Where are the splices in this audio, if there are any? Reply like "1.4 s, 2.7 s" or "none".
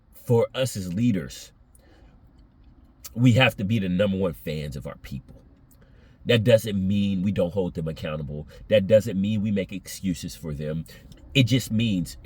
10.9 s

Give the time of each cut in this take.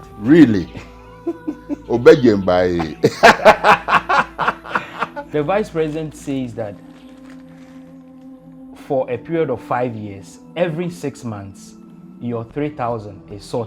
5.2 s

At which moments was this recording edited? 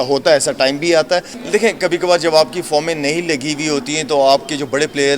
1.3 s

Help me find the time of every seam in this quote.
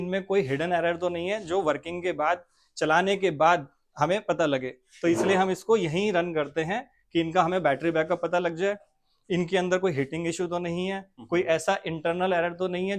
none

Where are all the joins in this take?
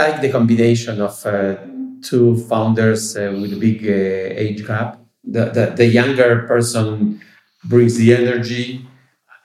5.3 s

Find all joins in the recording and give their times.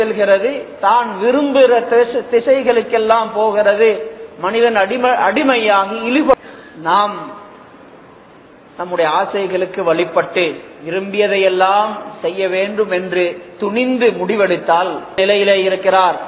6.4 s, 15.2 s

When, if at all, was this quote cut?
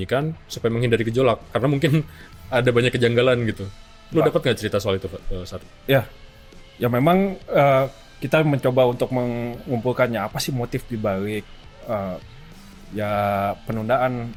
none

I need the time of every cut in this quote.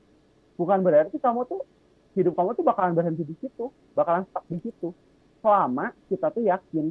none

